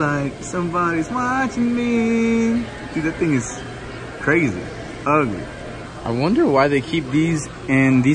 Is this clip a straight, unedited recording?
yes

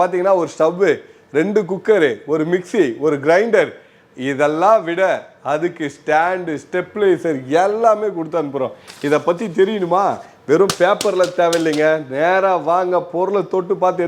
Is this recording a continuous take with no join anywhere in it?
yes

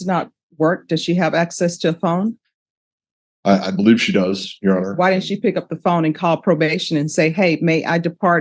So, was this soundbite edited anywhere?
no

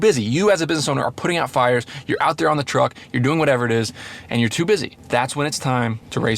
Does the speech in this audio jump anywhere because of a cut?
no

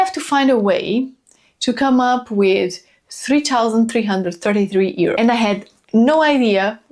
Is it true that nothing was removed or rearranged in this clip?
no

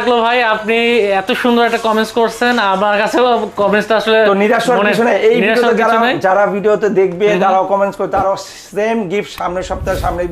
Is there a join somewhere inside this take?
no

